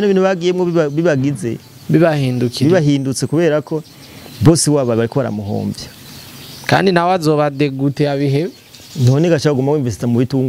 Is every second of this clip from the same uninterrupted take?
yes; 0 cuts

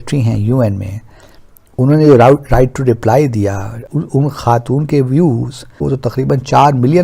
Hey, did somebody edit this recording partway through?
yes; 2 cuts; at 3.8 s, 5.8 s

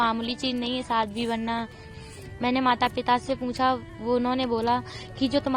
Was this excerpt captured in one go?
no; 1 cut; at 1.9 s

